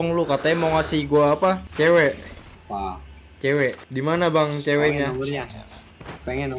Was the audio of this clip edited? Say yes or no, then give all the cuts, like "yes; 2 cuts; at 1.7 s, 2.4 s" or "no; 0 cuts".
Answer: no; 0 cuts